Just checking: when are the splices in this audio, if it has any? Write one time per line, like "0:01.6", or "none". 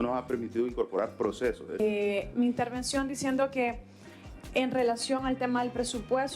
0:01.8